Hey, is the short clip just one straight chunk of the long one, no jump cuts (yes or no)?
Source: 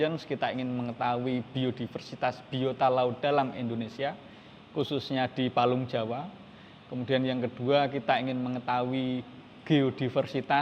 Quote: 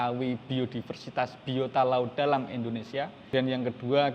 no